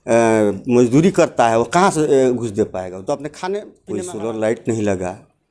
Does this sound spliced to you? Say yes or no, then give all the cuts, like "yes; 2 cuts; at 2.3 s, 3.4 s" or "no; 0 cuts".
yes; 1 cut; at 3.8 s